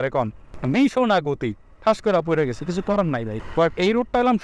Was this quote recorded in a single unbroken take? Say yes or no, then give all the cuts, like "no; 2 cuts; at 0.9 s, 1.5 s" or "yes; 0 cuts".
no; 1 cut; at 3.4 s